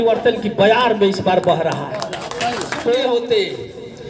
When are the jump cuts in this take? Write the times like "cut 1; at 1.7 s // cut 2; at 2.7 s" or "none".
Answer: cut 1; at 2.9 s